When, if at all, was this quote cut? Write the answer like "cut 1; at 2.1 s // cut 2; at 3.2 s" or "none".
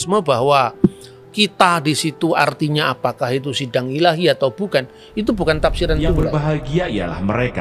cut 1; at 6.2 s